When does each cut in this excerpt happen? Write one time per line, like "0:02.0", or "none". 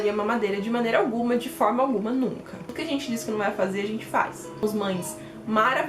0:02.7
0:04.6